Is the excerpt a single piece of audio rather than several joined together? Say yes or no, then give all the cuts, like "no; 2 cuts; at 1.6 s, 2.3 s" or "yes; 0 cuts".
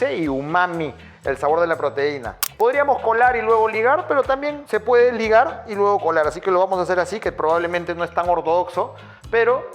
no; 1 cut; at 2.4 s